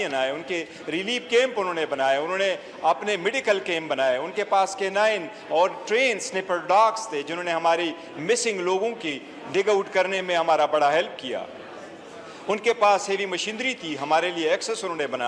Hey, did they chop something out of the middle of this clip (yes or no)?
no